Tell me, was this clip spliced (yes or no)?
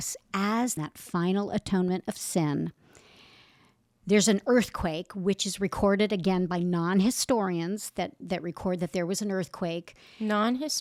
no